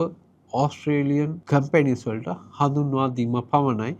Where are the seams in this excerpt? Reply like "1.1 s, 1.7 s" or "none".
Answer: 1.4 s